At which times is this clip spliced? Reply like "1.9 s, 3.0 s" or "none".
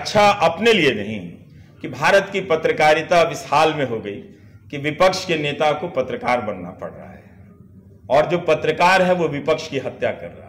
none